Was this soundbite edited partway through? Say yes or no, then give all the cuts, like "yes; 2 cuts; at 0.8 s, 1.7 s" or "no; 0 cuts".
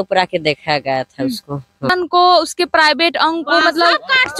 yes; 1 cut; at 1.9 s